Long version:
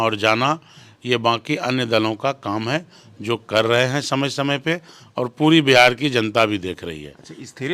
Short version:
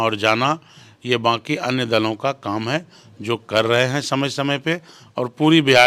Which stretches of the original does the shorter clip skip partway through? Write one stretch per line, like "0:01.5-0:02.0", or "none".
none